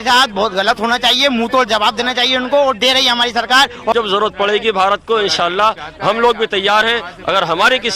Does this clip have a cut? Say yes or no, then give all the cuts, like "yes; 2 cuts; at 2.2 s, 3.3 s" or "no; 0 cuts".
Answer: yes; 1 cut; at 3.9 s